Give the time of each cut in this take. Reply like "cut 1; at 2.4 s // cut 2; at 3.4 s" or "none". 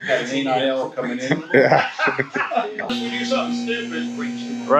cut 1; at 2.9 s